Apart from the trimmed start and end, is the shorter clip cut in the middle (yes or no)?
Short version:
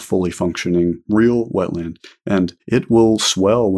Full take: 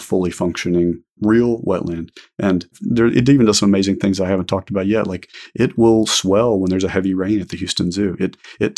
yes